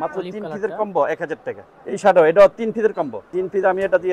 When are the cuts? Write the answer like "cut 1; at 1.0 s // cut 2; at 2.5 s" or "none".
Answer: cut 1; at 1.7 s // cut 2; at 3.3 s